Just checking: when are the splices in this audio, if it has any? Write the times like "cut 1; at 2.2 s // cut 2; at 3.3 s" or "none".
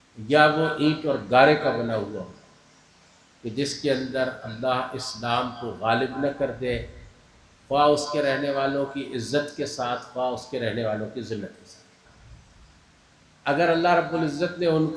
cut 1; at 12.0 s